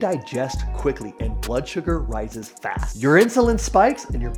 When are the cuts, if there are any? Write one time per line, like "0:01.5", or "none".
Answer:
none